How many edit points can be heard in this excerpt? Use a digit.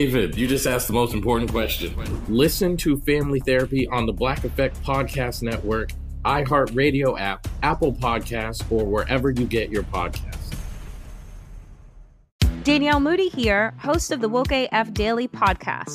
1